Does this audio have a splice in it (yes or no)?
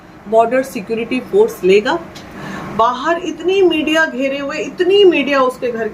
yes